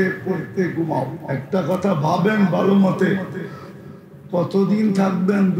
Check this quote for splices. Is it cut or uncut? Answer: cut